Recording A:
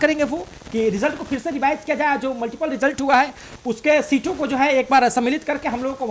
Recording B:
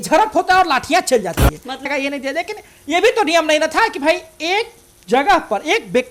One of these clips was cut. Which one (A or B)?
B